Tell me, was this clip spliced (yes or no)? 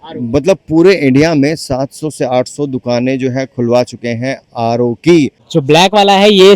yes